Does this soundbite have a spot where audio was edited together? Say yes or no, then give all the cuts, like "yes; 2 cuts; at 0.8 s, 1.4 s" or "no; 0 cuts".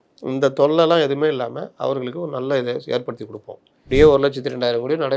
yes; 1 cut; at 3.9 s